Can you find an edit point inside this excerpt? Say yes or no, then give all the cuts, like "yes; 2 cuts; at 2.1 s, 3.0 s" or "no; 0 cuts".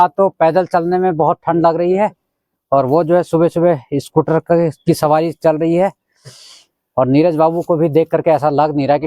no; 0 cuts